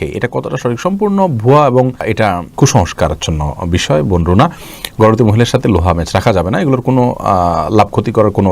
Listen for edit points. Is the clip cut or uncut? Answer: uncut